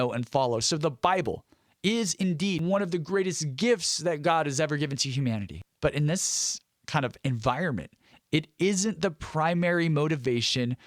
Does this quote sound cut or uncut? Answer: cut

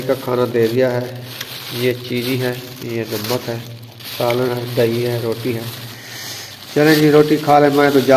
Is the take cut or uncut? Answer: uncut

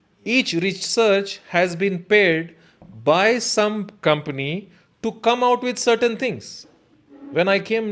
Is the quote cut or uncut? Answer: uncut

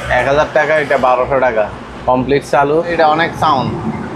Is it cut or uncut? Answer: cut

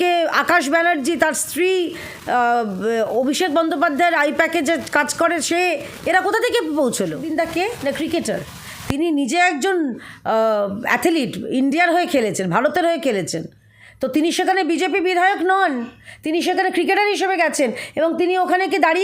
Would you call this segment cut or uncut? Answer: cut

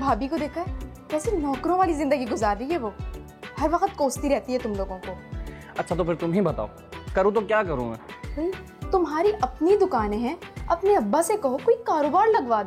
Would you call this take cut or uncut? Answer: uncut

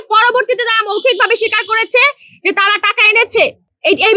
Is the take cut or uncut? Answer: uncut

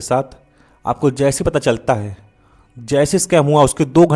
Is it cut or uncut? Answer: uncut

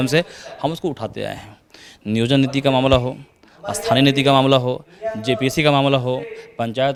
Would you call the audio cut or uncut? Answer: uncut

